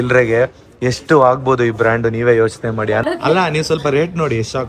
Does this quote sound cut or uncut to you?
cut